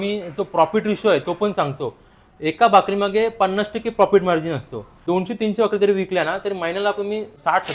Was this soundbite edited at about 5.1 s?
yes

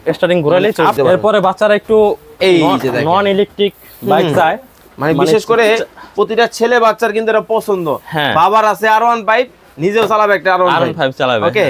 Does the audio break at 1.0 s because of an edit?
yes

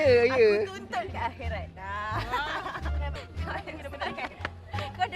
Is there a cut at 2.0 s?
no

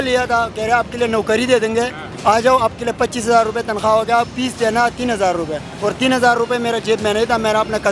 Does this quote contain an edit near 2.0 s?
yes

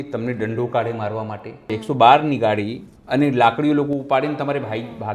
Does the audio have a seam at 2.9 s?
no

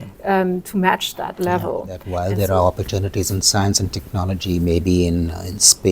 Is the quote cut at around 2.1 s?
yes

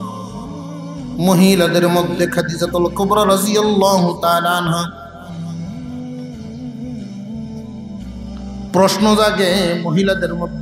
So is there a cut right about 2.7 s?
no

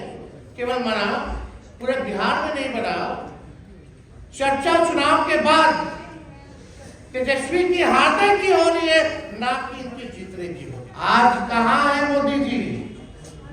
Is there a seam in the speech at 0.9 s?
no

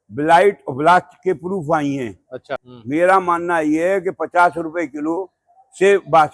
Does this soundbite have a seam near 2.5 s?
yes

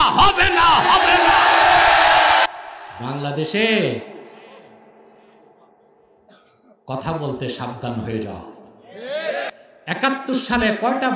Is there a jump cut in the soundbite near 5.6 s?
no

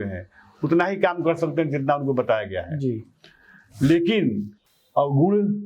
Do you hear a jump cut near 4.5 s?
yes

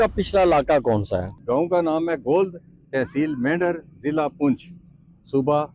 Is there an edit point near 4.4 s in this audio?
no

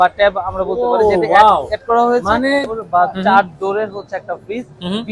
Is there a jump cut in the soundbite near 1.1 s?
no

